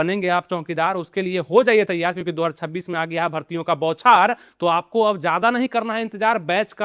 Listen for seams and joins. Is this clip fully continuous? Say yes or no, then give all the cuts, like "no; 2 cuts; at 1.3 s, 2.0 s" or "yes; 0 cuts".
yes; 0 cuts